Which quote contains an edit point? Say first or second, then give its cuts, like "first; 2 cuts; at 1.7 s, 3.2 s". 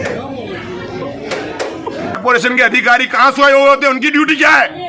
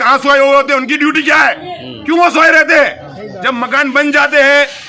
first; 1 cut; at 2.2 s